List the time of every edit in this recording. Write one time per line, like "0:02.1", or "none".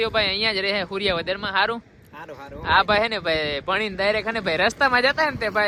none